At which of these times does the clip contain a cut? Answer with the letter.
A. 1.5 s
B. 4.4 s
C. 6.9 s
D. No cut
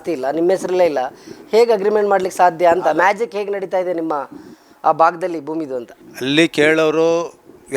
D